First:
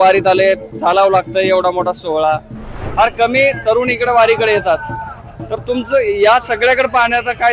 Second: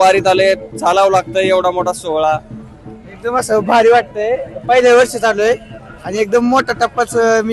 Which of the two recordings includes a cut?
first; 1 cut; at 2.8 s

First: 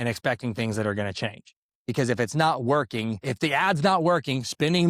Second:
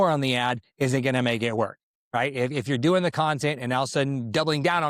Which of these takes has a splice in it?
first; 1 cut; at 3.2 s

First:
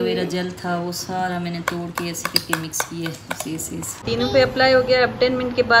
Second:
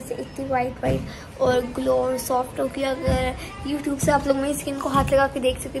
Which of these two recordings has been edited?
first; 1 cut; at 4.1 s

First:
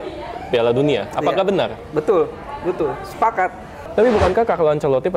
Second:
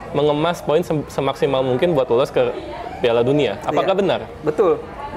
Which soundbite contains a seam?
first; 1 cut; at 3.8 s

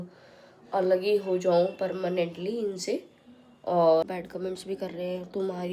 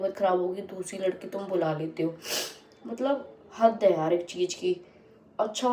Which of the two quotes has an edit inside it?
first; 1 cut; at 4.1 s

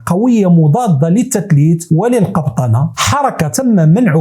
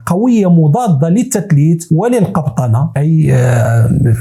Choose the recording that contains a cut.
first; 1 cut; at 3.0 s

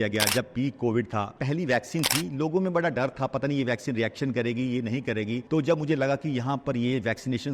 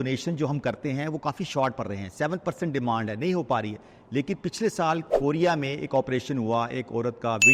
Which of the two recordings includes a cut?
first; 2 cuts; at 1.4 s, 5.4 s

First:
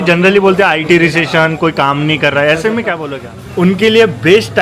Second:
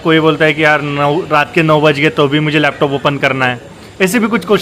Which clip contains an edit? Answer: first; 1 cut; at 3.0 s

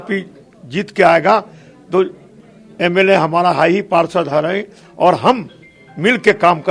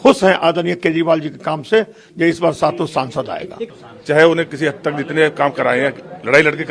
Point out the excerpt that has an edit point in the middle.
second; 1 cut; at 3.6 s

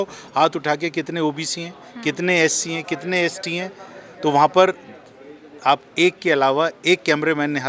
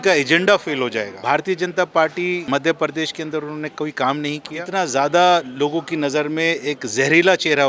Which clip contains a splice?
second; 3 cuts; at 1.1 s, 2.4 s, 4.6 s

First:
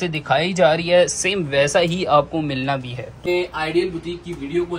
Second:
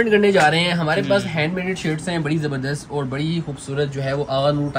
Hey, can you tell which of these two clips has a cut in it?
first; 1 cut; at 3.3 s

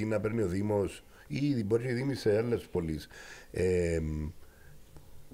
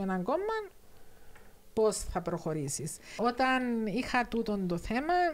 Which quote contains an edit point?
second; 1 cut; at 3.0 s

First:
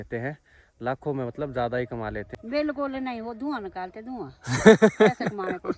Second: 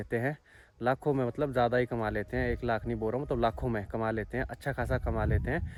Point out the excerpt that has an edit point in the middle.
first; 1 cut; at 2.4 s

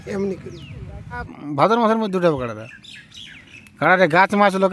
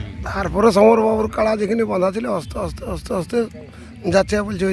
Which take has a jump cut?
first; 1 cut; at 1.4 s

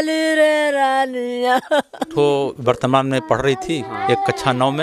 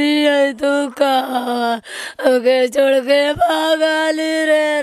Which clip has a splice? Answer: first; 1 cut; at 2.1 s

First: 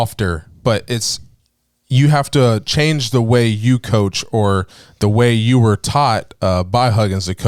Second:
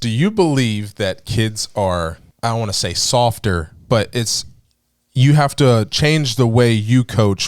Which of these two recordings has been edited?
second; 1 cut; at 2.2 s

